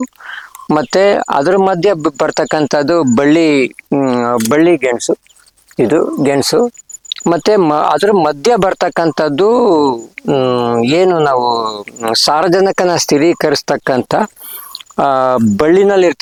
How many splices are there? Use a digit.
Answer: 0